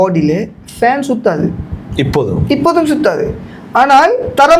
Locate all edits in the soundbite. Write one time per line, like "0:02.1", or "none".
none